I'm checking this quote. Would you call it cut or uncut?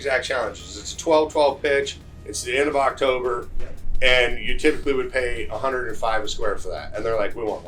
uncut